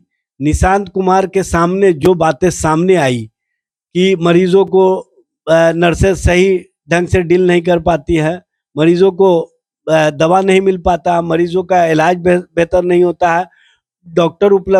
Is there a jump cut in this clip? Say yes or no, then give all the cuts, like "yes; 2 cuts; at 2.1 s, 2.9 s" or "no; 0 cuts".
no; 0 cuts